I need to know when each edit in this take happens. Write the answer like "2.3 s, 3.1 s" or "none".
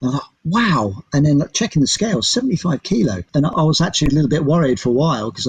3.5 s